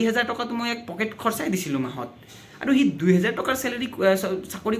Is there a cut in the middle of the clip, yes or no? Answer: no